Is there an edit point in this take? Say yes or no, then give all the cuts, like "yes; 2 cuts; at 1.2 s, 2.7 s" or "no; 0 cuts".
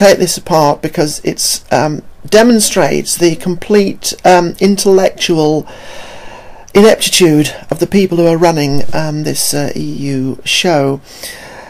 yes; 1 cut; at 3.1 s